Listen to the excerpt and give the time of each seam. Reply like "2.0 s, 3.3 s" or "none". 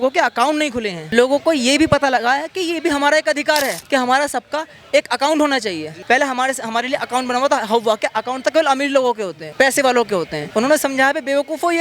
1.0 s, 3.8 s, 5.8 s, 9.4 s, 10.4 s